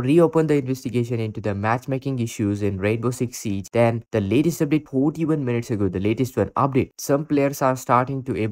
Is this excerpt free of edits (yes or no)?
yes